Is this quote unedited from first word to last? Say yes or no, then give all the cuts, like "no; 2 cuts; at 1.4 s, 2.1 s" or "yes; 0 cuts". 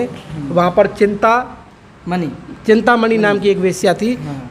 yes; 0 cuts